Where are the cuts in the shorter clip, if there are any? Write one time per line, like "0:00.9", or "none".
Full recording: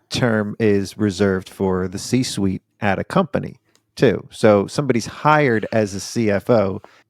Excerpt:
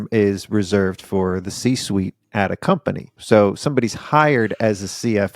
0:03.1